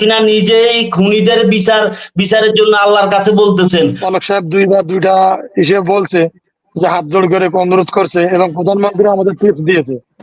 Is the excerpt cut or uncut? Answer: cut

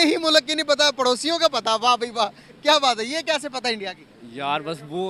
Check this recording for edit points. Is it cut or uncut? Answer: uncut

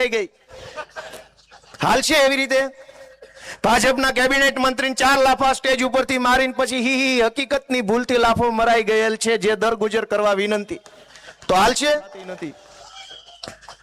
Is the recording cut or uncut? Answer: cut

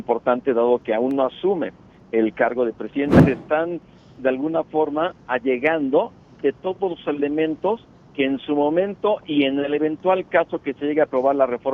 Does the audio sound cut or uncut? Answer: cut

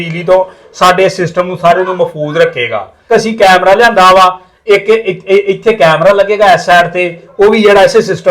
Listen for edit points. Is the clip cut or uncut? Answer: cut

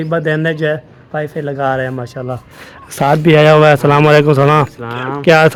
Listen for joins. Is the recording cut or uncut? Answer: uncut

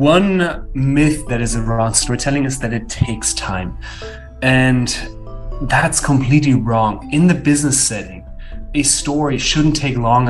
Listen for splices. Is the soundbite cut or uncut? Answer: uncut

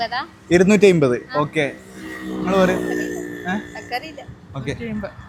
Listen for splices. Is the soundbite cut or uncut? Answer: uncut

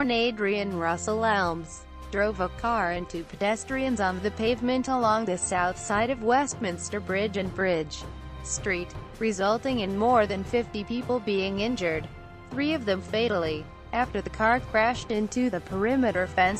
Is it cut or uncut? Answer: uncut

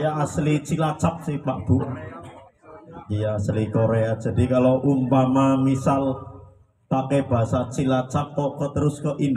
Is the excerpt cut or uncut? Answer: uncut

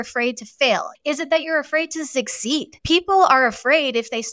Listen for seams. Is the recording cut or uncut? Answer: cut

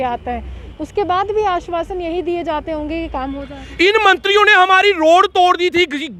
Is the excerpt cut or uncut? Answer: uncut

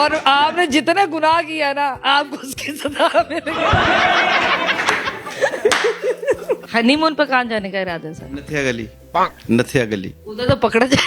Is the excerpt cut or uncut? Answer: cut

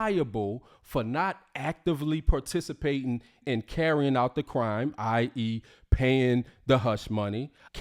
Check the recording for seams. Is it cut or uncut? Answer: cut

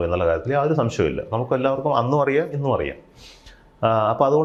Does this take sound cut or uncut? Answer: uncut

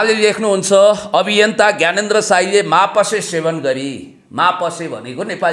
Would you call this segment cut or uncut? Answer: uncut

